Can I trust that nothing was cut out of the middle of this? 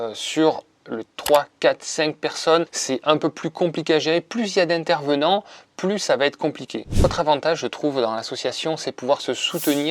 no; 1 cut; at 6.9 s

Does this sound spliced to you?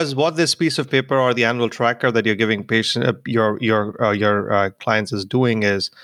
no; 0 cuts

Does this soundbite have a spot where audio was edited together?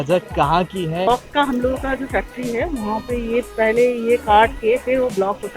yes; 1 cut; at 1.1 s

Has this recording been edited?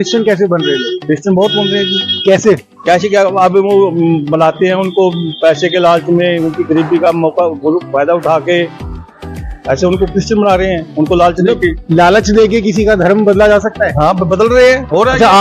no; 0 cuts

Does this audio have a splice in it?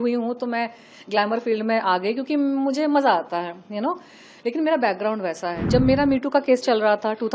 yes; 1 cut; at 5.6 s

